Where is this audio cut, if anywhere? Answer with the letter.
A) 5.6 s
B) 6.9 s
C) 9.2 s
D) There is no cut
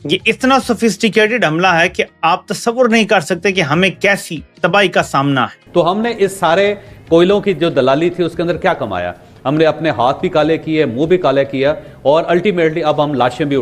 A